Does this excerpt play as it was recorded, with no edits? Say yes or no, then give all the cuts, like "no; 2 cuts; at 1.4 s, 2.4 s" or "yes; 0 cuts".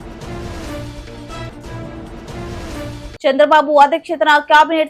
no; 1 cut; at 3.1 s